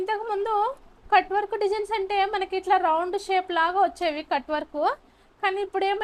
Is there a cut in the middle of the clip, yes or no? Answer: no